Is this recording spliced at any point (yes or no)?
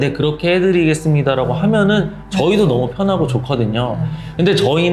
no